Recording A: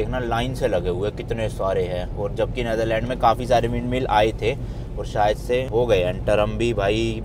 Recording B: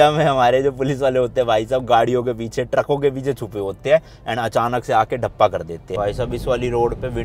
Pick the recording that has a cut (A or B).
B